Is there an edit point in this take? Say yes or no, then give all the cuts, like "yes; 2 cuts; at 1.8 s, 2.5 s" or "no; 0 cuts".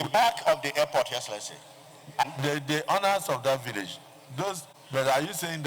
yes; 1 cut; at 4.7 s